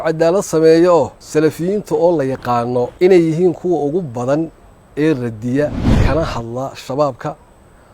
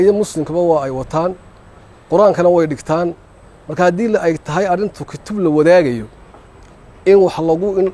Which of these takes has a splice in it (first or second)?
first